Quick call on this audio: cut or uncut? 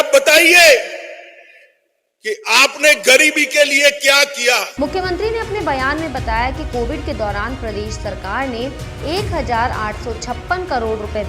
uncut